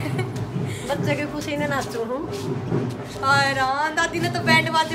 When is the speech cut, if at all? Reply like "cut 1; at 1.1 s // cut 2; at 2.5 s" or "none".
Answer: none